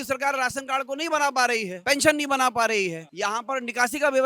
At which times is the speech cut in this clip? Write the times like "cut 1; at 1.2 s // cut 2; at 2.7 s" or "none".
cut 1; at 1.7 s // cut 2; at 3.1 s